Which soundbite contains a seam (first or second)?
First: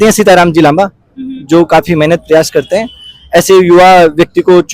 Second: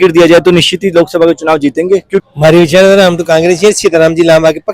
second